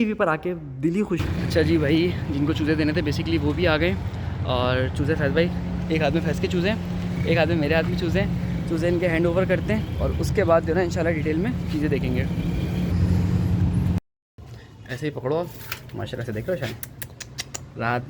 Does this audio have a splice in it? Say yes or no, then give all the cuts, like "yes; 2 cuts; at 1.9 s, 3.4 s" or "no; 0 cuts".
yes; 2 cuts; at 1.2 s, 14.2 s